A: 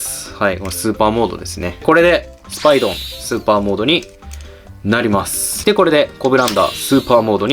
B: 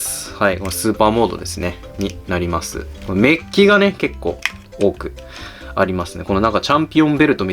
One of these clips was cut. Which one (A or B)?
A